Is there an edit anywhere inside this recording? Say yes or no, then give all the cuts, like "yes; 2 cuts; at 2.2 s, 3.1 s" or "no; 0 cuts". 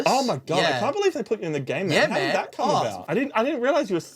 yes; 1 cut; at 3.0 s